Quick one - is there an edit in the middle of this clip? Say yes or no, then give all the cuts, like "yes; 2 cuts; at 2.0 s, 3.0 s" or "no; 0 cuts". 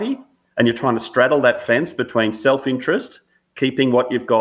no; 0 cuts